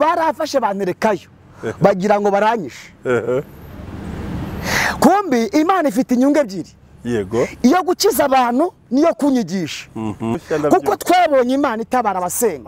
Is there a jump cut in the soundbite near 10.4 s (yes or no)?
yes